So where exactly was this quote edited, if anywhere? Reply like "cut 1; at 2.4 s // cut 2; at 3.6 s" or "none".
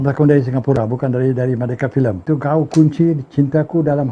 cut 1; at 2.2 s